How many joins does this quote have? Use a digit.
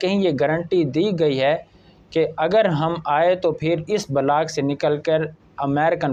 0